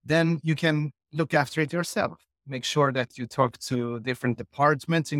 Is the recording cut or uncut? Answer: uncut